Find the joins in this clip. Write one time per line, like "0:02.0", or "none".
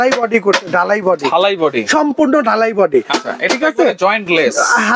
none